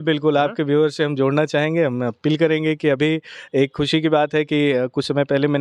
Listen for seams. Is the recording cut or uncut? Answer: uncut